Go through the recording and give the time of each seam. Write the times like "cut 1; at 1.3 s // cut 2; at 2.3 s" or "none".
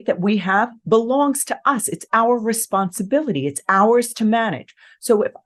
none

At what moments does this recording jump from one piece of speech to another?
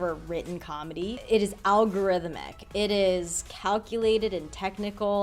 cut 1; at 1.2 s

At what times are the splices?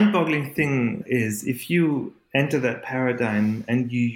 cut 1; at 1.0 s

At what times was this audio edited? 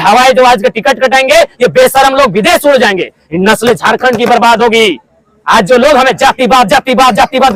none

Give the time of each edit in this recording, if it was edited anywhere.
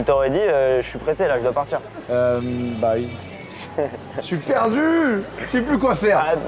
cut 1; at 2.0 s // cut 2; at 5.3 s

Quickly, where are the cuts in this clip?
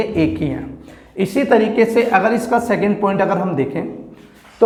none

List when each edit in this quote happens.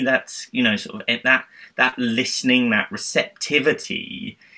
none

